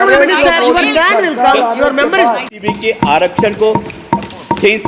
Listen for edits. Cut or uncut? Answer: cut